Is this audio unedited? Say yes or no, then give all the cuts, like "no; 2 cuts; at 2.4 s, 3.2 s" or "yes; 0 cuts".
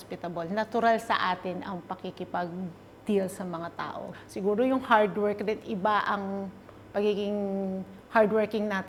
yes; 0 cuts